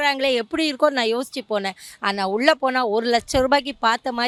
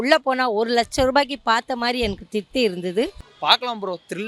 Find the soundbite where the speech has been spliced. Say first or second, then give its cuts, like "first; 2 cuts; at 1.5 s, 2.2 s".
second; 1 cut; at 3.3 s